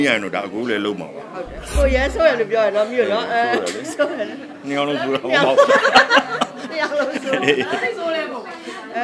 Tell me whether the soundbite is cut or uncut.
cut